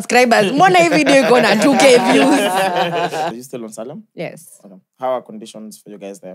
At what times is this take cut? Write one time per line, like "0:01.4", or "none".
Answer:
0:03.3